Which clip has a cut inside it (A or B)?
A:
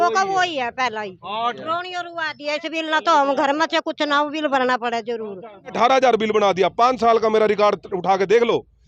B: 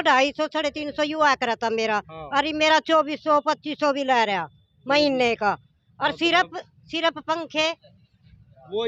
A